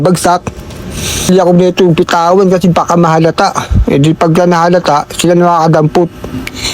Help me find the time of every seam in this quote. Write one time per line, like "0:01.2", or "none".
0:01.3